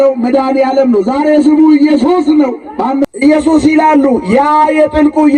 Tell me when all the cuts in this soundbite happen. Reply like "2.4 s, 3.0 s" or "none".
3.0 s